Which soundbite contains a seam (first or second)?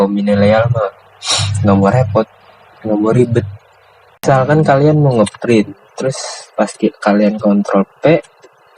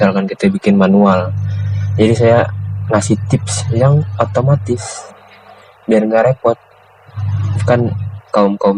first